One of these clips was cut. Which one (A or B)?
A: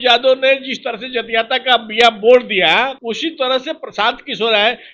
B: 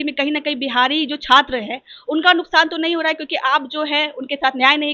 A